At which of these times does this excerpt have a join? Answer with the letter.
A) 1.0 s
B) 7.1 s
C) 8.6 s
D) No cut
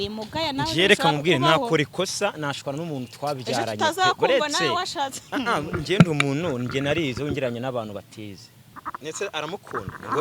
C